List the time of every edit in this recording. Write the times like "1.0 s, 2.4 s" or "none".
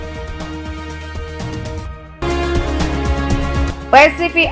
2.1 s, 3.6 s

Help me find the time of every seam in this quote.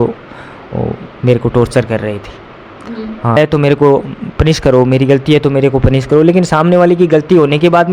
3.4 s

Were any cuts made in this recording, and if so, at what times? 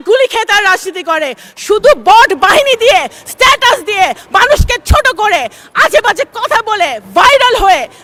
none

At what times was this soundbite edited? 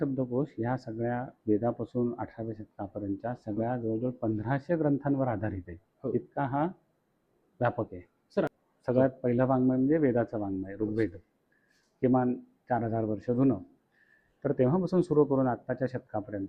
8.5 s

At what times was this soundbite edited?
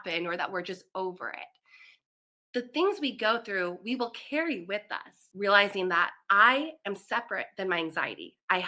5.2 s

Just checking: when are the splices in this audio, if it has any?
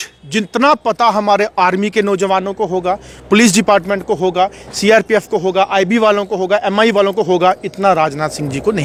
none

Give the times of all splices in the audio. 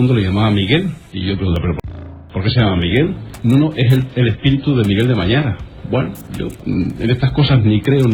1.1 s, 3.3 s, 6.6 s

